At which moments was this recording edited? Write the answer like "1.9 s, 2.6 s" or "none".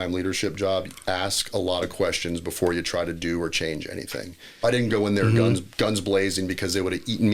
4.6 s